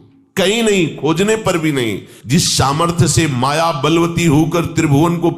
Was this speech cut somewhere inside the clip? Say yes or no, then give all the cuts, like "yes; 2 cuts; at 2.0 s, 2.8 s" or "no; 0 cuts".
yes; 1 cut; at 2.1 s